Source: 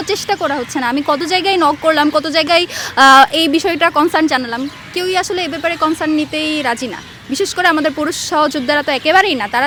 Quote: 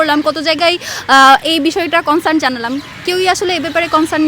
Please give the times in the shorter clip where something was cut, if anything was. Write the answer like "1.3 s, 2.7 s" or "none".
none